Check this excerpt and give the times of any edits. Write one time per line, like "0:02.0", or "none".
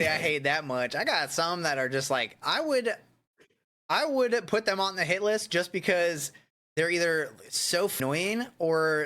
0:08.0